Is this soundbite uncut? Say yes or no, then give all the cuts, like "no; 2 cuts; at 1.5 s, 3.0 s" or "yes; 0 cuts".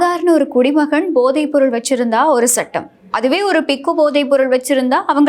yes; 0 cuts